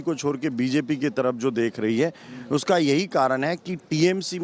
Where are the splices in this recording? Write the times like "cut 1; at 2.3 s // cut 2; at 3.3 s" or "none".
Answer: none